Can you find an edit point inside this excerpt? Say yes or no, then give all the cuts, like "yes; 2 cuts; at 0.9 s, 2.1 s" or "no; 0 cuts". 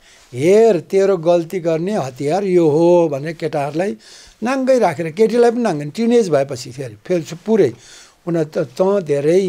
no; 0 cuts